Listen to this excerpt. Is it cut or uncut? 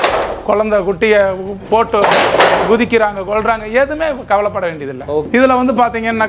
cut